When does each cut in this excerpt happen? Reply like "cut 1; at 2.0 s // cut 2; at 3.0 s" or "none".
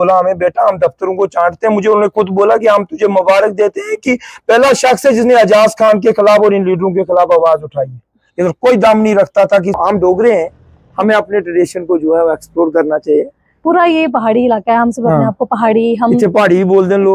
cut 1; at 9.8 s